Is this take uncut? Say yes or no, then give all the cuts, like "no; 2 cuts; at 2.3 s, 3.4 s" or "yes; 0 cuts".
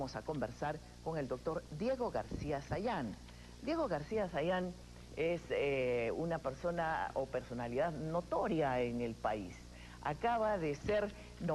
no; 1 cut; at 1.3 s